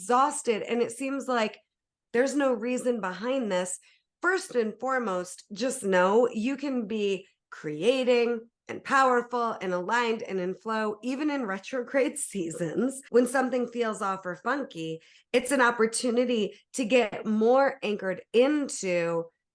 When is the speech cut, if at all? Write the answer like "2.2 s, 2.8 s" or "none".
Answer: 13.0 s